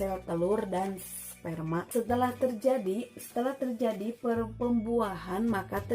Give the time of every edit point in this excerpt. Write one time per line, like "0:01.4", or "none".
0:01.9